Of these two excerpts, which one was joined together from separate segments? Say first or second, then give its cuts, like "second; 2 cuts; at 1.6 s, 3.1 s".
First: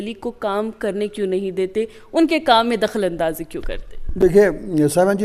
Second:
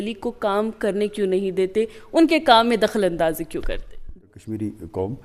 second; 1 cut; at 4.1 s